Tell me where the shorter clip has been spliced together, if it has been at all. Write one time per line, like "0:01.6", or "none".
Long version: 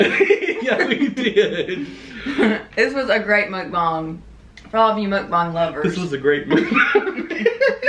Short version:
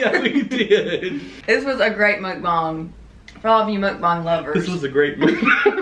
0:01.4

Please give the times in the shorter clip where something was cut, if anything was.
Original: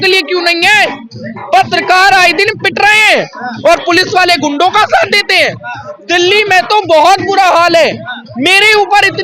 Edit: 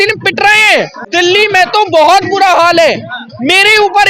0:01.0

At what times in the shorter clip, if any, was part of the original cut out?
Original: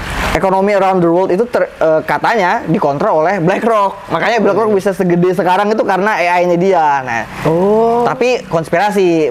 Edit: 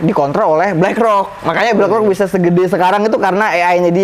none

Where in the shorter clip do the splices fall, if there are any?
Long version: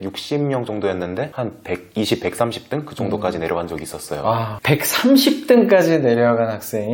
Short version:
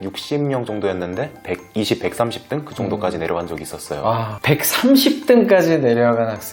0:01.3

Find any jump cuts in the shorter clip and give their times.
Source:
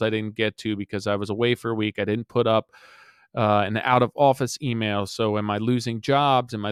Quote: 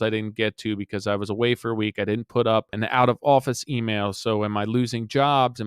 0:02.8

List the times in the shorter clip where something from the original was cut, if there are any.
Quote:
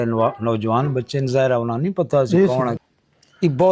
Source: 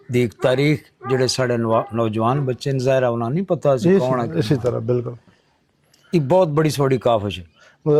0:02.8

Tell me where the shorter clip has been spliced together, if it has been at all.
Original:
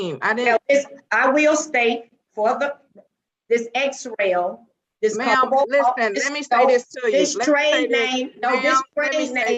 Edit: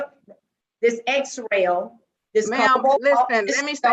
none

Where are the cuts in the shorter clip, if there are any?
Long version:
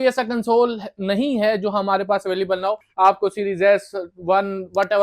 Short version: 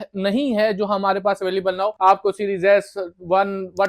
0:01.9

